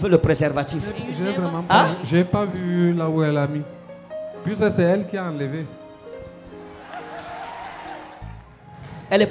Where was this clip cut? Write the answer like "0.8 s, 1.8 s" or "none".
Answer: 8.2 s